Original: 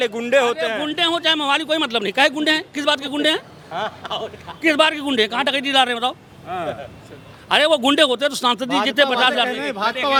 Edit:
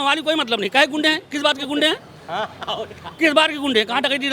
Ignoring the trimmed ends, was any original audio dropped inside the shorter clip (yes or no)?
no